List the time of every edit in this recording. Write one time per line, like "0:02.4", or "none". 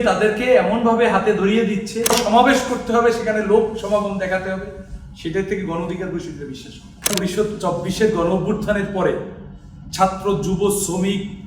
0:02.1
0:07.1